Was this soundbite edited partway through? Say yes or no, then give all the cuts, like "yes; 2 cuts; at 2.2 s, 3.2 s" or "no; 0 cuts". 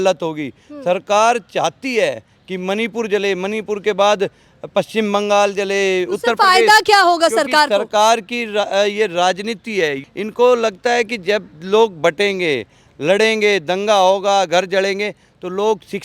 no; 0 cuts